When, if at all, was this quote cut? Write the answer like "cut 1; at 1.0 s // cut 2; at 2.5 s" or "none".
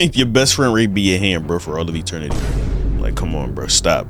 none